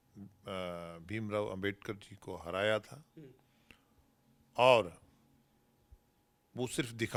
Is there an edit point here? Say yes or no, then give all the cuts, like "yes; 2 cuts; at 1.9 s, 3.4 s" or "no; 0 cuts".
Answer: no; 0 cuts